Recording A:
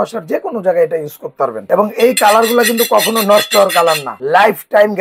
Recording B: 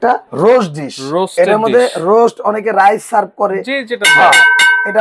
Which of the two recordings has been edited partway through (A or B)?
A